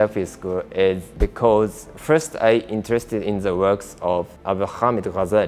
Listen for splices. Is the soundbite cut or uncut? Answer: cut